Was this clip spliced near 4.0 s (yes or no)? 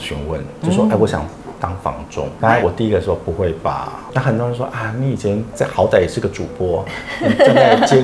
yes